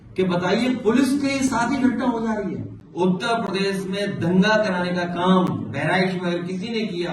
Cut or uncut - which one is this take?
cut